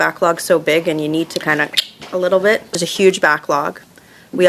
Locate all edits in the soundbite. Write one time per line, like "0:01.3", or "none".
0:02.7